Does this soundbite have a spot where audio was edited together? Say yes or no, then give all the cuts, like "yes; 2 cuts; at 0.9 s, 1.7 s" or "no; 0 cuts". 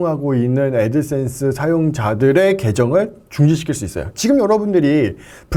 no; 0 cuts